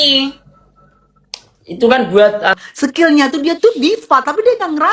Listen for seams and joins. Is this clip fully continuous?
no; 1 cut; at 2.6 s

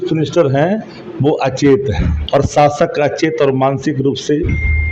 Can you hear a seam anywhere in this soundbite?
yes; 1 cut; at 2.1 s

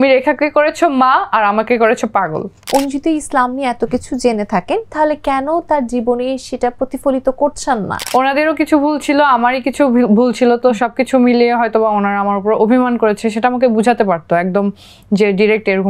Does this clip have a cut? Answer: yes; 2 cuts; at 2.6 s, 7.9 s

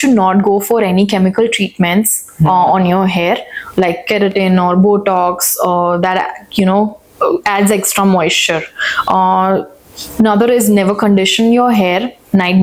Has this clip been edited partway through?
no; 0 cuts

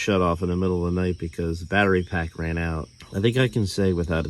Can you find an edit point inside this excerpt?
yes; 1 cut; at 2.9 s

